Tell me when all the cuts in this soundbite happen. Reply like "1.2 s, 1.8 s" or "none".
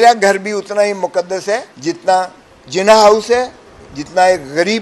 1.7 s

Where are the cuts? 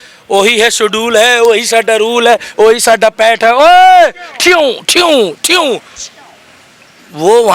none

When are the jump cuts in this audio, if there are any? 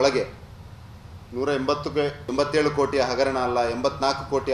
2.3 s

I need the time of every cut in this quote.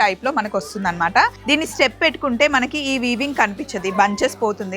1.3 s

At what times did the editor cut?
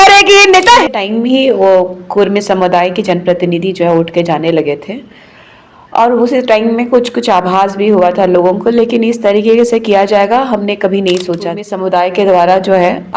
0.9 s, 11.7 s

